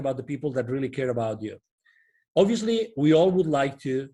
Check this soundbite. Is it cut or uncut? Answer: uncut